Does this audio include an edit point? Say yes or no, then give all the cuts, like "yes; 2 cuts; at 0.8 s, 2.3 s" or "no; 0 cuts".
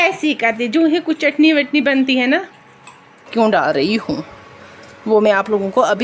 yes; 1 cut; at 3.3 s